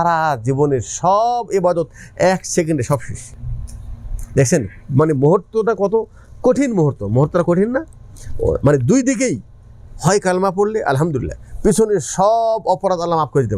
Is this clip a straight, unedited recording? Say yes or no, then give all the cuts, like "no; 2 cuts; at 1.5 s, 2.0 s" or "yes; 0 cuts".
yes; 0 cuts